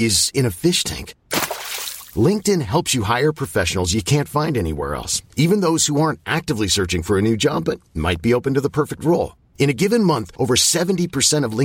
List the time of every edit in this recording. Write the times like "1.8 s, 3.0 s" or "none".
none